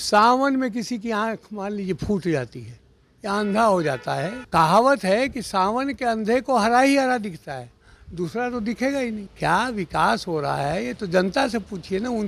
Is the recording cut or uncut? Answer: cut